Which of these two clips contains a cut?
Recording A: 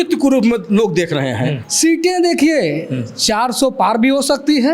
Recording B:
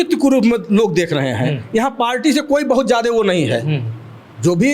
A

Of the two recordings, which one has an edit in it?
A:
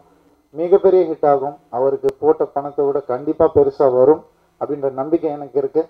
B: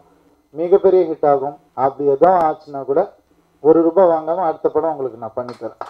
B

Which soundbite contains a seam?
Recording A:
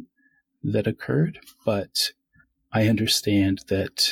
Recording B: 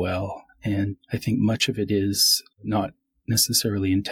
B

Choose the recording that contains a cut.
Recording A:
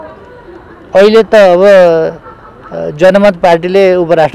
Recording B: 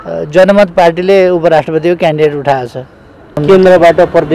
B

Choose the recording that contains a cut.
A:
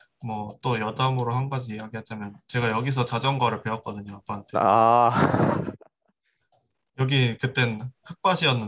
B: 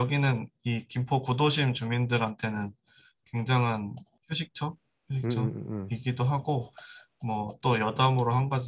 B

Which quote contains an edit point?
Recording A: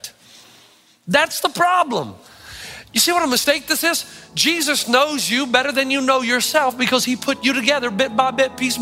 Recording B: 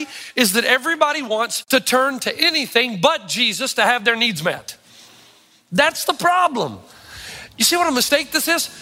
B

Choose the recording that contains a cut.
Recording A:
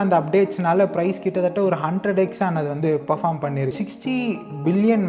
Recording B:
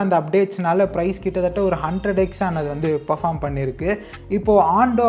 A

